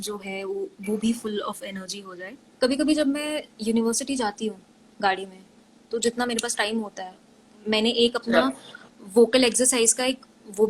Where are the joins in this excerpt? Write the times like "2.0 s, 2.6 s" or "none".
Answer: 2.4 s